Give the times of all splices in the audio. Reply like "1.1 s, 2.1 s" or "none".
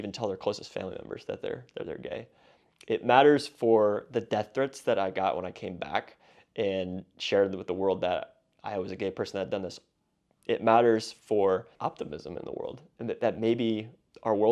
11.7 s